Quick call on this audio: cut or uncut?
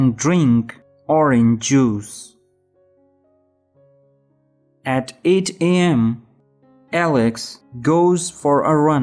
cut